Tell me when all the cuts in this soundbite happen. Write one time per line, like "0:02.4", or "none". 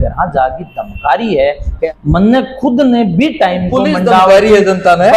0:01.9